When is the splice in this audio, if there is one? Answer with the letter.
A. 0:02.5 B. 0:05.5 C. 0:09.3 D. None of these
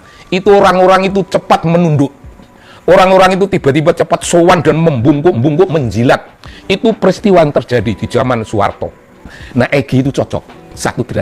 C